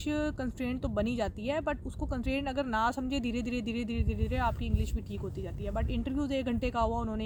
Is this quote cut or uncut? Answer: uncut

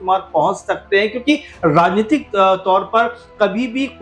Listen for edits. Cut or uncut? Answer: uncut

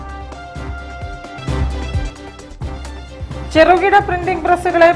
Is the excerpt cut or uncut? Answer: cut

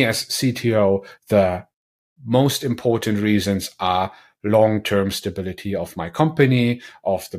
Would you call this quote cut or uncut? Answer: uncut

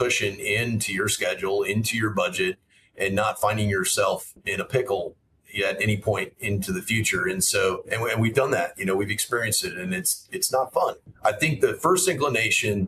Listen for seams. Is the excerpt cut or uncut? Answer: cut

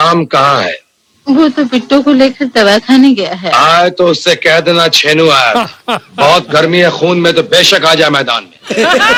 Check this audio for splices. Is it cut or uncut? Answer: uncut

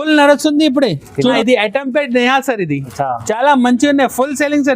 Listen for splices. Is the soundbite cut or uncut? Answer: cut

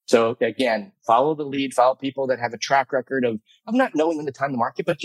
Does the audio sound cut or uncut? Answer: cut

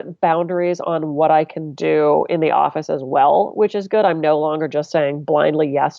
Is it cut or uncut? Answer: uncut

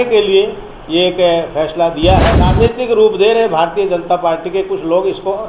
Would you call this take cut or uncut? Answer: cut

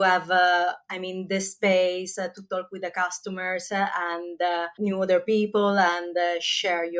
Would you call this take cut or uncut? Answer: uncut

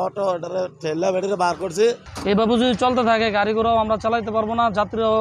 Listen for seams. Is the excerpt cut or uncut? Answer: cut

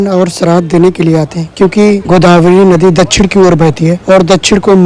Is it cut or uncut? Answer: uncut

